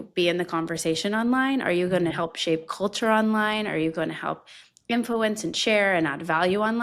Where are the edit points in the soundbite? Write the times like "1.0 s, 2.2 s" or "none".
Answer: none